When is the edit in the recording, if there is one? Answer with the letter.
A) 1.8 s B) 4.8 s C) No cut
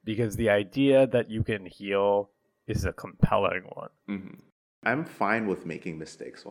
B